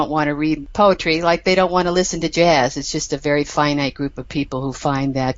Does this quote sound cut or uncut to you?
uncut